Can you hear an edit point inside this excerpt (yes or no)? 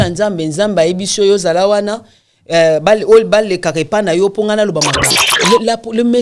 yes